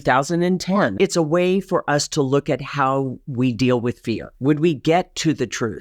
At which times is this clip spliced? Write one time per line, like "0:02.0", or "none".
0:00.9
0:04.3